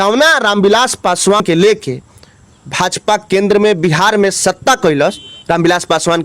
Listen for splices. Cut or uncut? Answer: cut